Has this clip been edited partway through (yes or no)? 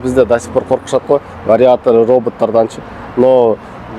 no